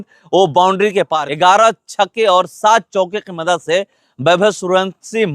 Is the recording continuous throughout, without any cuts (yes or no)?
no